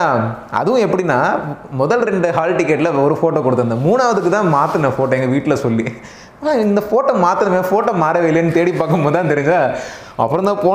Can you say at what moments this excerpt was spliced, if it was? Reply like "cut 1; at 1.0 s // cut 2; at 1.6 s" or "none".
none